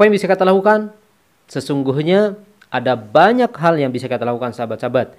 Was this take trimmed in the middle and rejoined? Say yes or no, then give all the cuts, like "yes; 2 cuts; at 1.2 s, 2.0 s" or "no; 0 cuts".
no; 0 cuts